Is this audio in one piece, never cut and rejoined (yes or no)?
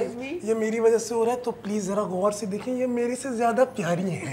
yes